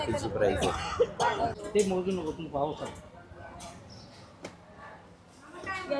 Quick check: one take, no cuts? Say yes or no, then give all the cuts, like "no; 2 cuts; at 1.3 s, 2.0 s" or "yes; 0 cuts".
no; 1 cut; at 1.6 s